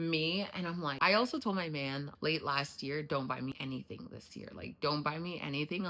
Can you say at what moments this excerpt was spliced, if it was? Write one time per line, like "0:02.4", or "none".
0:00.9